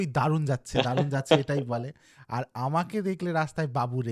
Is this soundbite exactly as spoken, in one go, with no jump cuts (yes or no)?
yes